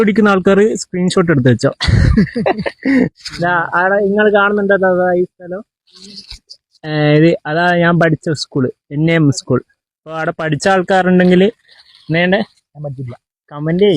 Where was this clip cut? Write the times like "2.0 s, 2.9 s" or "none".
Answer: 3.2 s

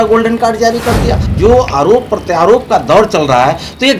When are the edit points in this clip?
1.2 s

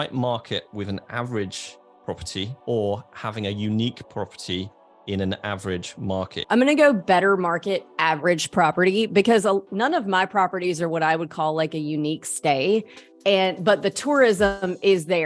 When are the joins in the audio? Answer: 2.5 s, 6.0 s

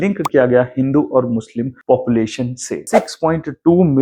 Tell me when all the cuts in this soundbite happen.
2.9 s

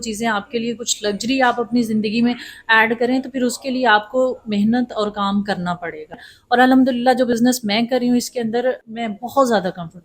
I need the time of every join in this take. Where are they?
6.3 s, 8.9 s

